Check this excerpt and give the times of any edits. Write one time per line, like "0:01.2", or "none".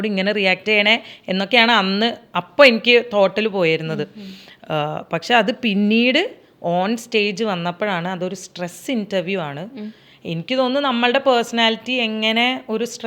none